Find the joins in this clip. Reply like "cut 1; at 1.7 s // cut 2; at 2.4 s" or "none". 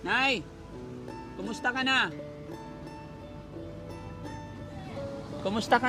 none